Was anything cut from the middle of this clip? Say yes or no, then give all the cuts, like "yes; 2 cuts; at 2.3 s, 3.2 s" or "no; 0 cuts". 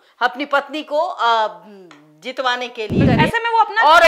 yes; 1 cut; at 3.0 s